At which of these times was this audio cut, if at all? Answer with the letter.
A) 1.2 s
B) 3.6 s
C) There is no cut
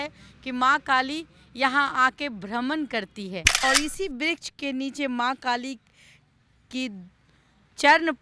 B